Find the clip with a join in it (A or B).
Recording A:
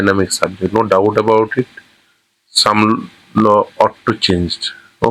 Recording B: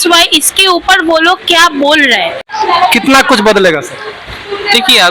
B